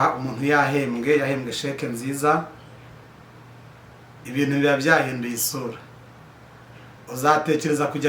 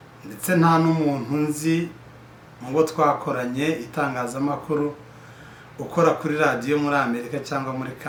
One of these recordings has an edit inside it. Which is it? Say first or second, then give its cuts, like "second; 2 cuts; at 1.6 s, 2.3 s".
first; 1 cut; at 2.8 s